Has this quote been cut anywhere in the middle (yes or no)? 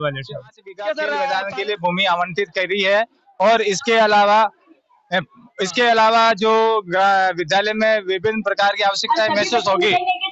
yes